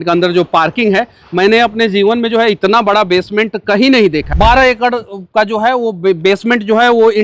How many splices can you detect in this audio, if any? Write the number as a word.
one